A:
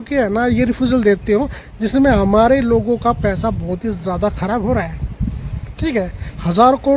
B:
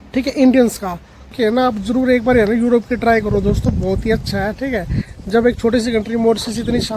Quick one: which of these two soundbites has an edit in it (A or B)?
B